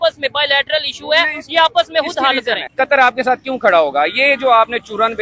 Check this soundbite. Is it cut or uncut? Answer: cut